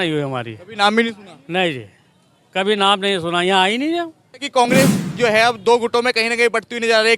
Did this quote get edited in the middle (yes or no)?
yes